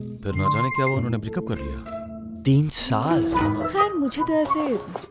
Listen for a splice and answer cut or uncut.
cut